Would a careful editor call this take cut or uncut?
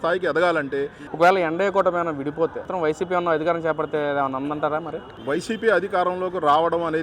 cut